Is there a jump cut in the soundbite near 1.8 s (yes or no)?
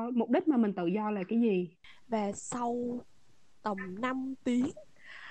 yes